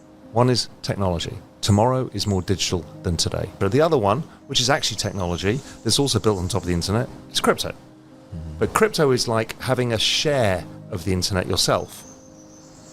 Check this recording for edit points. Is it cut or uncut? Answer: cut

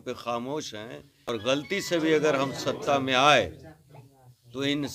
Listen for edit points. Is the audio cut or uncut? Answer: cut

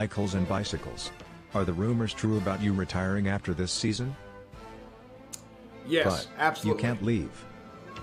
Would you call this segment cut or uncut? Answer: uncut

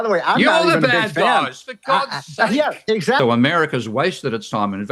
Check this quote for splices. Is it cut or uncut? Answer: cut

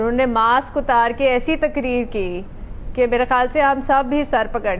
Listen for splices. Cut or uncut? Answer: uncut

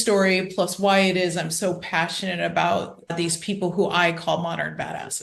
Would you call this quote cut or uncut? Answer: uncut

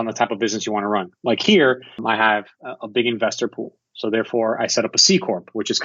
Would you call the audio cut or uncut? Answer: cut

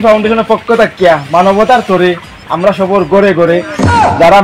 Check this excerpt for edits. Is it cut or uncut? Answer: uncut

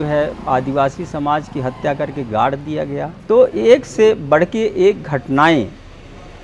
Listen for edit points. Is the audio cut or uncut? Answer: cut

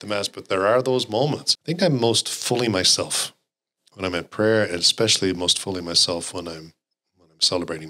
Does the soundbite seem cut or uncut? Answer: cut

